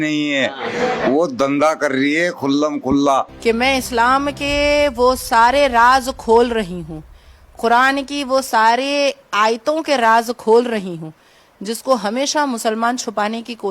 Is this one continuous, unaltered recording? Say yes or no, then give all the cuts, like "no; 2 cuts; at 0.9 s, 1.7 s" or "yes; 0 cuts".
no; 1 cut; at 3.3 s